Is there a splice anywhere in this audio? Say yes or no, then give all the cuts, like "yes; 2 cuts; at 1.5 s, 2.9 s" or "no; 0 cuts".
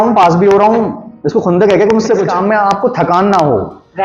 yes; 1 cut; at 2.3 s